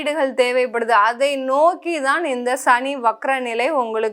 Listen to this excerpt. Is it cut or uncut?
uncut